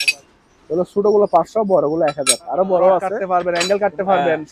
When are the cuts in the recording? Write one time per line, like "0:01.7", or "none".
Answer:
0:03.2